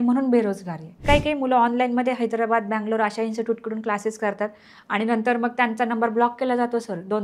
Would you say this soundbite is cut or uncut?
cut